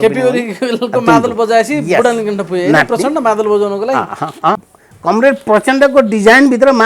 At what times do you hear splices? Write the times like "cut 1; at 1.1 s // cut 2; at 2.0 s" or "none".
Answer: cut 1; at 4.6 s